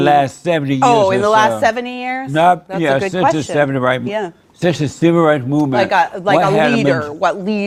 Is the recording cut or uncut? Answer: uncut